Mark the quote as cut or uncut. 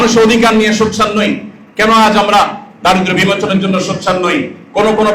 uncut